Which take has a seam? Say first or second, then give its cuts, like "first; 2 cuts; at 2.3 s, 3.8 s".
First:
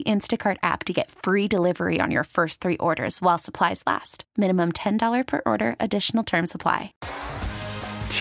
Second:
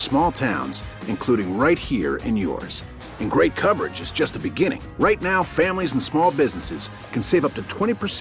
first; 1 cut; at 6.9 s